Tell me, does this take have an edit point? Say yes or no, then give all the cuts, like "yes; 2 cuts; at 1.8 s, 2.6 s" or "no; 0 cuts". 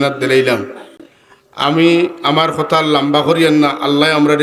no; 0 cuts